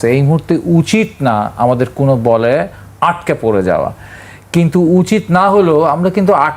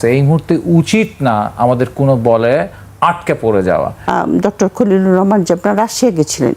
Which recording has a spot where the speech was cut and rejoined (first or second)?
second